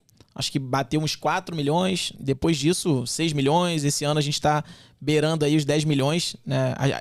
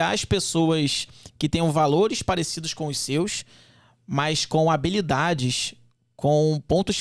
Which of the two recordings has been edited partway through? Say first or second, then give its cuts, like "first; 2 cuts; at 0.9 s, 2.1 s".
first; 1 cut; at 2.1 s